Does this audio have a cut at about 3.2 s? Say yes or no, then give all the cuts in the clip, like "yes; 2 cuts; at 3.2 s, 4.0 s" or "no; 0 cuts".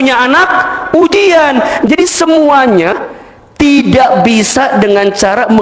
no; 1 cut; at 1.7 s